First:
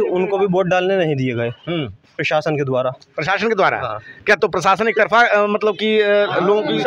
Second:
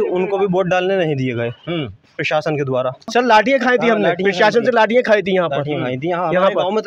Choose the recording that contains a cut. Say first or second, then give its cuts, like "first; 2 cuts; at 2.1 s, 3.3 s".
second; 1 cut; at 3.1 s